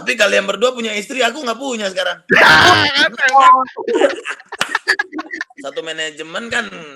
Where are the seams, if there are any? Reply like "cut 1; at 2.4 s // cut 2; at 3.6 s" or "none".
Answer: cut 1; at 5.5 s